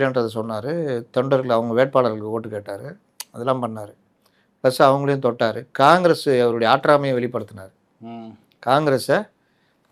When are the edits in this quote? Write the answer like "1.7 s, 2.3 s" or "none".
none